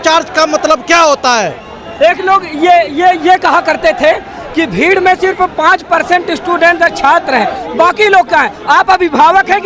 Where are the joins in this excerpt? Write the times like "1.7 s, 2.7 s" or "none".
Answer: none